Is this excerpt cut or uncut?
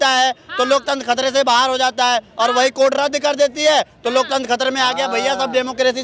uncut